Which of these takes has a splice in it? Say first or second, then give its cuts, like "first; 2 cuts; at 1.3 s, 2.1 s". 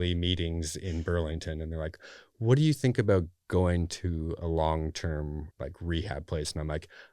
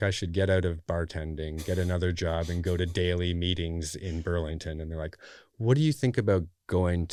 first; 1 cut; at 5.5 s